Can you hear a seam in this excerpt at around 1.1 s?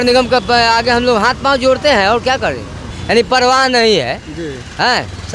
no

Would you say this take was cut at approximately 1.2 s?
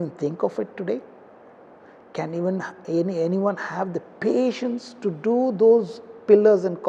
no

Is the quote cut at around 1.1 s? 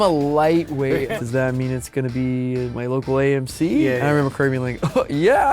yes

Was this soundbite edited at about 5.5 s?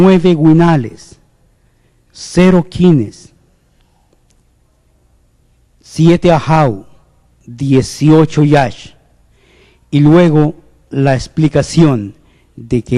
no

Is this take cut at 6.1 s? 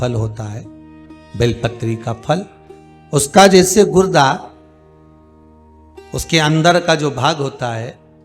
yes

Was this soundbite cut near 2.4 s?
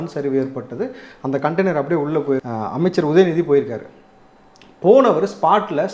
yes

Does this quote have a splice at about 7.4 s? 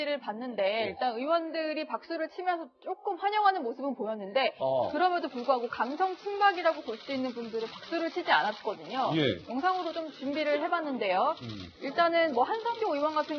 no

